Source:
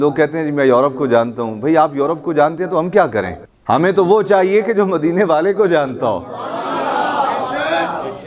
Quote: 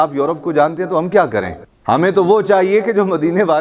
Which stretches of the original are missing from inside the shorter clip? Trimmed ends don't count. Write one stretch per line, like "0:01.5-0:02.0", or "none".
none